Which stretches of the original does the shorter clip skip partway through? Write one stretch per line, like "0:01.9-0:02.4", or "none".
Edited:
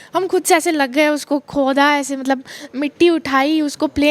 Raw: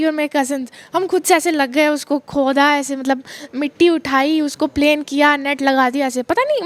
none